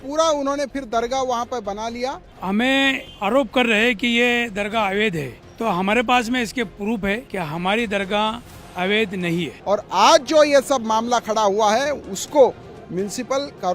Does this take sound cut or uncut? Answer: cut